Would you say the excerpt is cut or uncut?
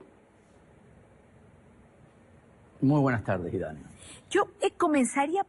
cut